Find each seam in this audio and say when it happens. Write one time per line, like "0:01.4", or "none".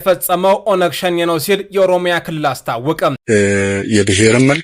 0:03.2